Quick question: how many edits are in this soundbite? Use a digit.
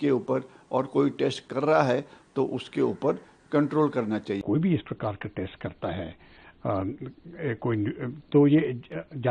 1